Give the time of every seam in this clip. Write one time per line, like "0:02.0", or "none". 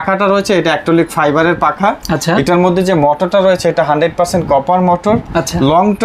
none